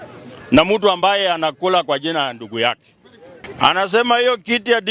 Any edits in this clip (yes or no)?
yes